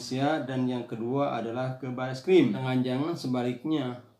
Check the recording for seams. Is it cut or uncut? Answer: cut